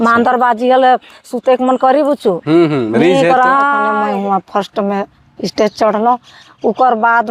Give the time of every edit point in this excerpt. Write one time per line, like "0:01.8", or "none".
0:03.9